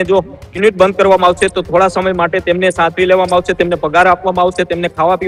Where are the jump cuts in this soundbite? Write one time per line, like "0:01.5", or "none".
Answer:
none